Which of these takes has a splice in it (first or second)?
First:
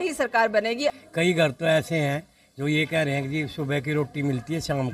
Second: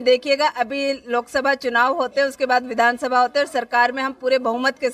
first